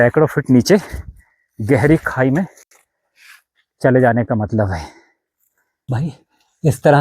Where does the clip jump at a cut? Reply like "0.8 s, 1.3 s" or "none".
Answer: 5.8 s